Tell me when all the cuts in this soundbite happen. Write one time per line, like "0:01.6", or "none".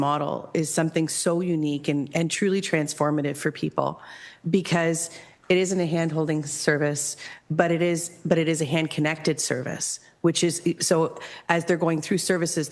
none